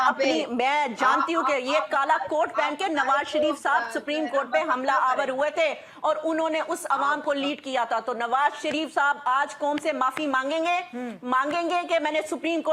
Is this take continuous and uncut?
yes; 0 cuts

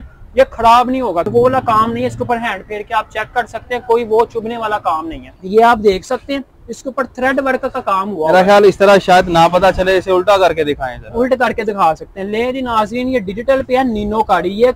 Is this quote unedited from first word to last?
no; 2 cuts; at 1.3 s, 5.3 s

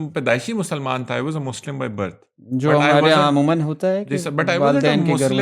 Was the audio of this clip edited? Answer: no; 0 cuts

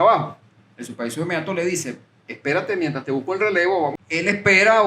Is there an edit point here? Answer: yes; 1 cut; at 3.9 s

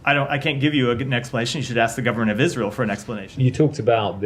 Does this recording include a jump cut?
yes; 1 cut; at 3.2 s

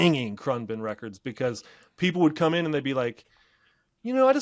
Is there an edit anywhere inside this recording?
no; 0 cuts

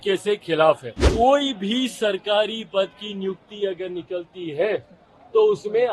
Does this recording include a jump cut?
yes; 1 cut; at 1.0 s

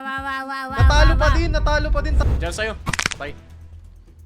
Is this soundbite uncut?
no; 1 cut; at 2.2 s

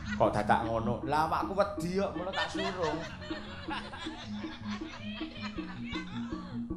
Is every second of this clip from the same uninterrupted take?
yes; 0 cuts

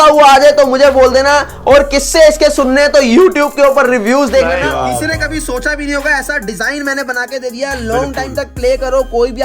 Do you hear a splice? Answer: yes; 1 cut; at 4.6 s

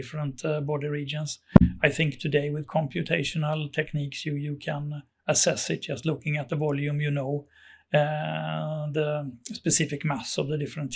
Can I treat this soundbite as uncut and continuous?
yes; 0 cuts

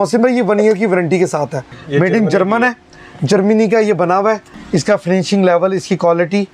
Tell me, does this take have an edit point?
yes; 2 cuts; at 1.7 s, 4.5 s

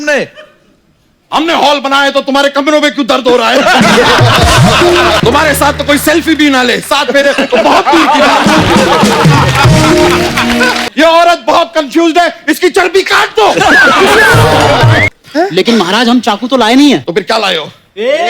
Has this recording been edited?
yes; 3 cuts; at 5.2 s, 10.8 s, 15.1 s

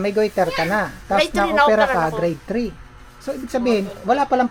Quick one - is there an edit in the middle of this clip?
no; 0 cuts

